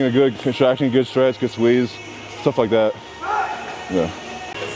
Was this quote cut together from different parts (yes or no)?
no